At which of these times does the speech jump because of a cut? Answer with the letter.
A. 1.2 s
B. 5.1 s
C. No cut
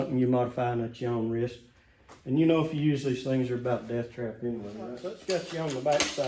B